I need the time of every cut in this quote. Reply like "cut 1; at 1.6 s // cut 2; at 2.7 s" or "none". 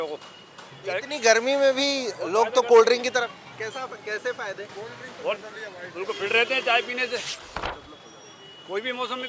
cut 1; at 7.5 s